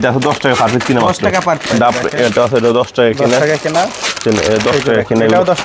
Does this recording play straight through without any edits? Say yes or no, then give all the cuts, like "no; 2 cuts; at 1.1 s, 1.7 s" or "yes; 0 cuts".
no; 1 cut; at 1.6 s